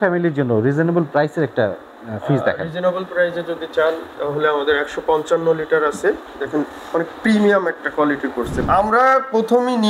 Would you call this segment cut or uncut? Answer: cut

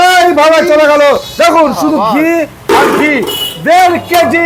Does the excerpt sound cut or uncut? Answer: uncut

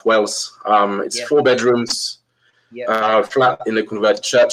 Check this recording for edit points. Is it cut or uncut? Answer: uncut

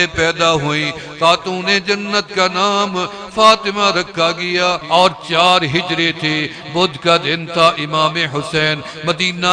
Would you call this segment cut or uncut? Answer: cut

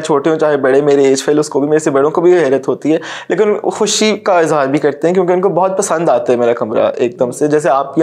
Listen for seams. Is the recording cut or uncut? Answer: uncut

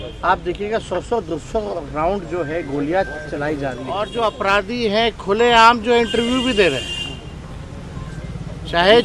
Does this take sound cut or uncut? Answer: cut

